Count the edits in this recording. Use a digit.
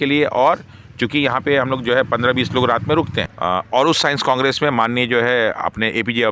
1